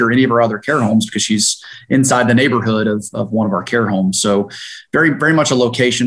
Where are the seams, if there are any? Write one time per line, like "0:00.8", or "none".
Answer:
none